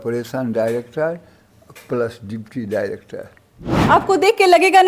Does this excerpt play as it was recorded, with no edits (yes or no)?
no